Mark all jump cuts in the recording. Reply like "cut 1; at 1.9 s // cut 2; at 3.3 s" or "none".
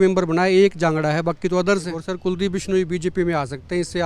cut 1; at 2.0 s